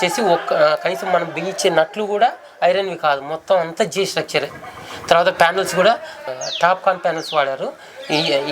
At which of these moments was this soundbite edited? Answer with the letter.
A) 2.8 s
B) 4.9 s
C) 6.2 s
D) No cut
C